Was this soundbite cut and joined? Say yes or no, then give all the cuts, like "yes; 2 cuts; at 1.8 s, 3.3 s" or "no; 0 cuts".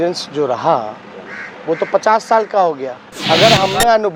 yes; 1 cut; at 3.1 s